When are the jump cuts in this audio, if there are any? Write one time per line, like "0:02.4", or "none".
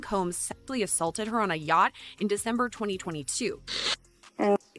0:03.7